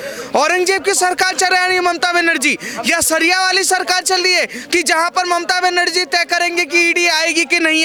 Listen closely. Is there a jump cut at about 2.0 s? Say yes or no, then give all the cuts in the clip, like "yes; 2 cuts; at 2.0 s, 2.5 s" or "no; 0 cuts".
no; 0 cuts